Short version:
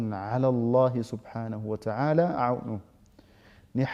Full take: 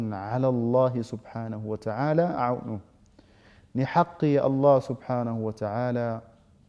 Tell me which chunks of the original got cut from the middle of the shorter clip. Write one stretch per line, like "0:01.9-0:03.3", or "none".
none